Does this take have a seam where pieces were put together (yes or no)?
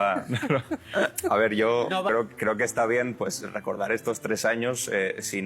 yes